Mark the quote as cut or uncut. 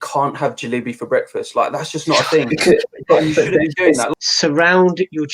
cut